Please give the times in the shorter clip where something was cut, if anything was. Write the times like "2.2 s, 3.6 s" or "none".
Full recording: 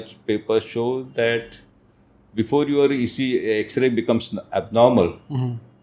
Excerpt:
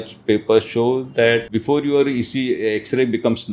1.5 s